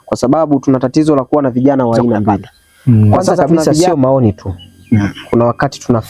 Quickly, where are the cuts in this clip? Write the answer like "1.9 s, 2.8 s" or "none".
3.9 s